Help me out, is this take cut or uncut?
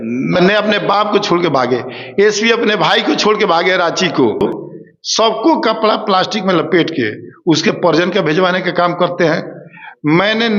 cut